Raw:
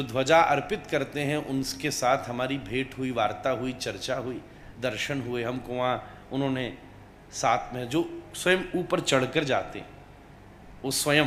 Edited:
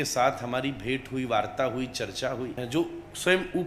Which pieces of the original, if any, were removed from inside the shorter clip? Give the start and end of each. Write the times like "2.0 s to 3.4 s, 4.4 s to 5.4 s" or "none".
4.5 s to 7.8 s